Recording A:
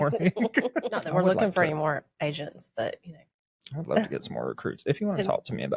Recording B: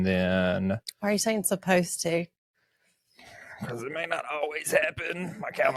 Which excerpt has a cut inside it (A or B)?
A